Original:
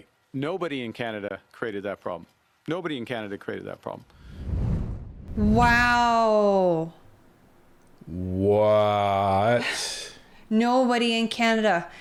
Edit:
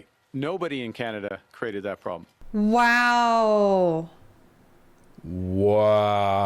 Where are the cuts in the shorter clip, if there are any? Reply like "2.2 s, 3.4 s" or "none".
2.3 s